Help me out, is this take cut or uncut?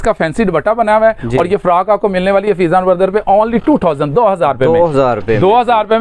uncut